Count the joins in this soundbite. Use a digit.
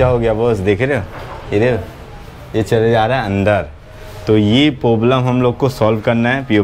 0